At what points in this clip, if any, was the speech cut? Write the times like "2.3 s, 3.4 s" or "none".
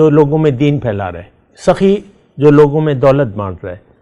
none

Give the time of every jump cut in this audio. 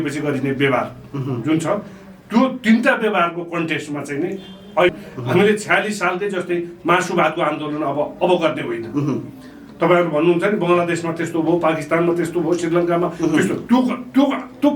4.9 s

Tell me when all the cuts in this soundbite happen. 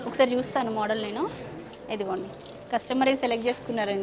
none

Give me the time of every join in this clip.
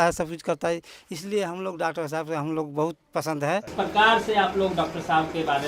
3.7 s

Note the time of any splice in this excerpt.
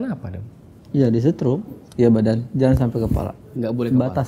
1.8 s

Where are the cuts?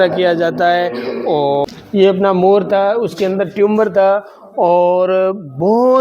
1.7 s

